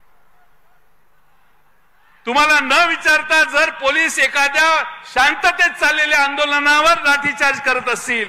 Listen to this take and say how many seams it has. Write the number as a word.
zero